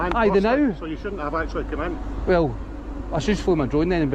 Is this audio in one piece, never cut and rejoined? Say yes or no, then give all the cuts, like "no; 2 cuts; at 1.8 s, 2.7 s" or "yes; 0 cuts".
yes; 0 cuts